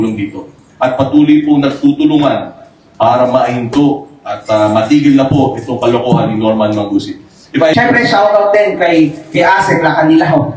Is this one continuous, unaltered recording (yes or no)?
no